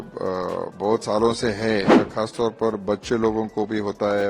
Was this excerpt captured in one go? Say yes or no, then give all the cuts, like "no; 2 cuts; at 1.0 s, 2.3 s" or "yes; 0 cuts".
no; 1 cut; at 1.9 s